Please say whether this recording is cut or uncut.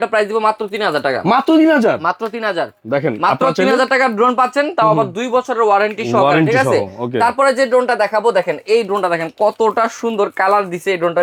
uncut